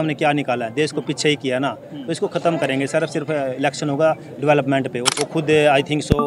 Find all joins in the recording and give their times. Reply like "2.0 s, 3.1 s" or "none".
5.1 s